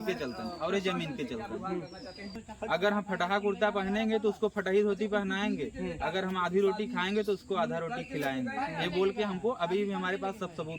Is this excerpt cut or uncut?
cut